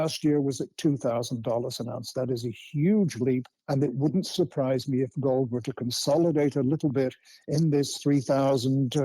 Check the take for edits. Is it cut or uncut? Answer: cut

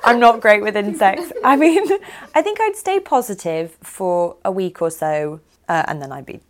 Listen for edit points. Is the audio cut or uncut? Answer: cut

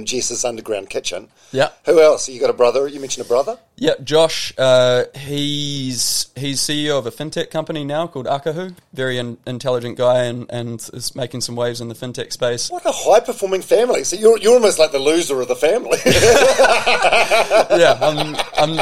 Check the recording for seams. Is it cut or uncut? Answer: cut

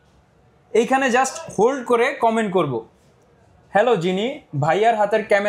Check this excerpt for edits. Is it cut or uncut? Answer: uncut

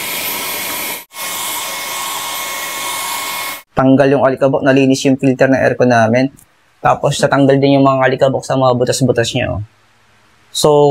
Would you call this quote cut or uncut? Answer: cut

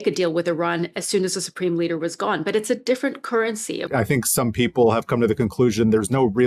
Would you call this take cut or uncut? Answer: cut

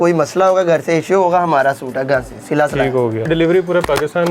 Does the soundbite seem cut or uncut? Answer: cut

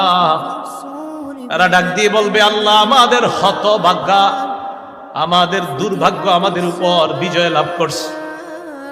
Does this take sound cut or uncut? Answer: cut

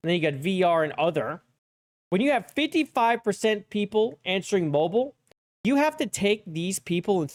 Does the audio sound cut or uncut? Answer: uncut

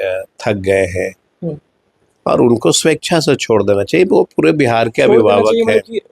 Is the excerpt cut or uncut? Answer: uncut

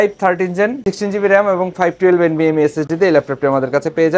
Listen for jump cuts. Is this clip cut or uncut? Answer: uncut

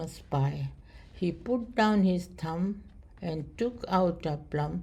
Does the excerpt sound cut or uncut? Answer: uncut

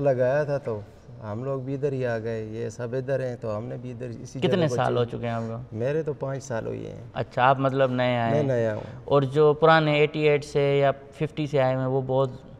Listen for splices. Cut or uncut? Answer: uncut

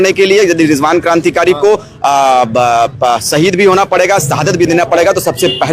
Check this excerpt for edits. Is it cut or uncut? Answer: uncut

